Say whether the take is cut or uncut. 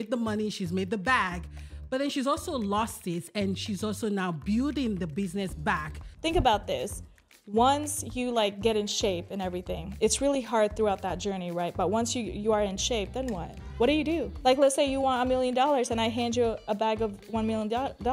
cut